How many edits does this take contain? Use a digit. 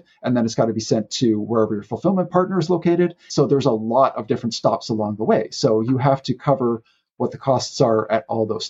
1